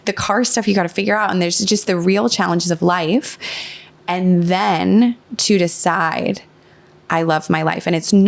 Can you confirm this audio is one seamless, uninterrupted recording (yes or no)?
yes